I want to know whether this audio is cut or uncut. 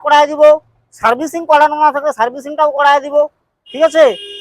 uncut